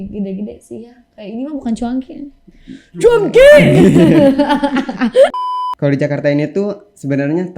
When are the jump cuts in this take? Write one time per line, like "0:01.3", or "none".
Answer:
0:05.3